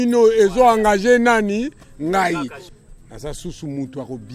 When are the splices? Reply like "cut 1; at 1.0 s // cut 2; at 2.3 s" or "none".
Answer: cut 1; at 2.6 s